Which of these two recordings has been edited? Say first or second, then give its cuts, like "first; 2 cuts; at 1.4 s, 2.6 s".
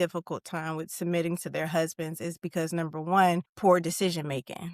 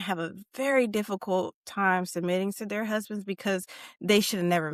first; 1 cut; at 3.5 s